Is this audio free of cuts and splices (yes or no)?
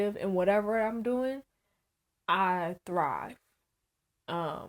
yes